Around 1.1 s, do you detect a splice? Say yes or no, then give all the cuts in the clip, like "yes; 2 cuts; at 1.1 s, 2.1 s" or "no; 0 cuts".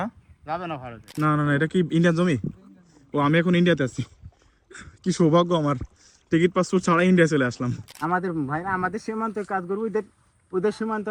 yes; 2 cuts; at 1.1 s, 7.9 s